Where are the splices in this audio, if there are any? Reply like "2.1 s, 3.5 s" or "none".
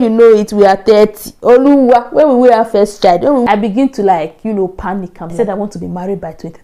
3.3 s, 5.3 s